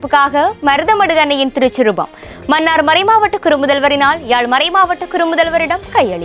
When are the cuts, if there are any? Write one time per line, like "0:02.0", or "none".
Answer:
none